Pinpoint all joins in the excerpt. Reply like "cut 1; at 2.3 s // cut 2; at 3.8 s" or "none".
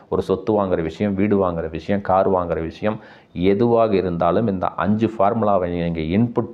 none